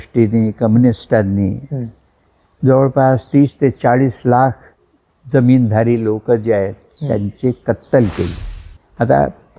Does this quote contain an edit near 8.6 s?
yes; 2 cuts; at 6.9 s, 8.6 s

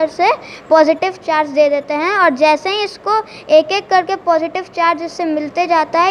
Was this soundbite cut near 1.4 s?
no; 0 cuts

